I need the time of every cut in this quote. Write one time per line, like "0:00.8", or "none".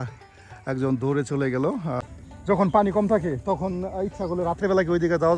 0:02.0